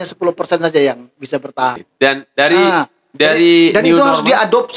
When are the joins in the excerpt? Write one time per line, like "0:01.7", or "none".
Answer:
0:01.8